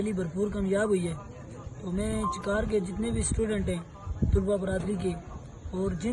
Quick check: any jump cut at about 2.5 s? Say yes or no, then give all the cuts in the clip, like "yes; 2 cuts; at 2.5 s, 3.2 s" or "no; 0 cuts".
no; 0 cuts